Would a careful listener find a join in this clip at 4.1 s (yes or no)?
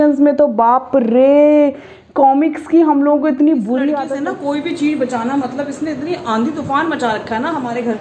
yes